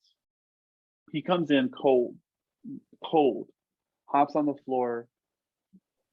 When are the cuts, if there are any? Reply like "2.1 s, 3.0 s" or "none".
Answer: none